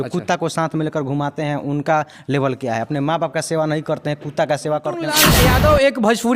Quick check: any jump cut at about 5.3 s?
yes; 1 cut; at 5.3 s

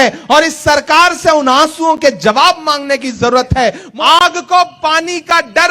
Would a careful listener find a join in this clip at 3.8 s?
yes; 1 cut; at 3.8 s

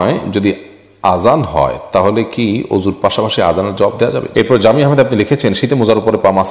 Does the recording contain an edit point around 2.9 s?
no; 1 cut; at 4.3 s

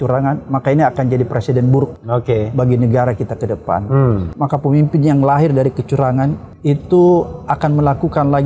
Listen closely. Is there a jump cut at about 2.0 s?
yes; 3 cuts; at 2.0 s, 4.3 s, 6.5 s

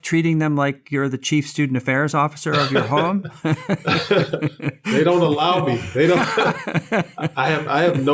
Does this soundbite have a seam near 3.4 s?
no; 0 cuts

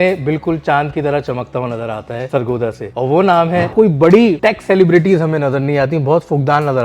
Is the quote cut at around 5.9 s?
no; 3 cuts; at 2.5 s, 3.7 s, 4.4 s

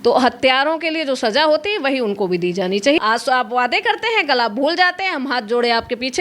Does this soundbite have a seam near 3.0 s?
yes; 1 cut; at 3.0 s

